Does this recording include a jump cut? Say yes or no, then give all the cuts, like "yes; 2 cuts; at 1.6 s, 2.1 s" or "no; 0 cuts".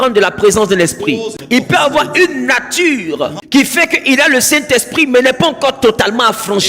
yes; 2 cuts; at 1.3 s, 3.4 s